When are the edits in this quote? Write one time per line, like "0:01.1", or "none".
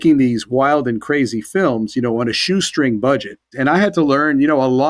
0:03.5